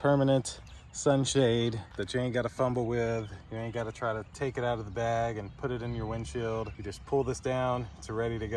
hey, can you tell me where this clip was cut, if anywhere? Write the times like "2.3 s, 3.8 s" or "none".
none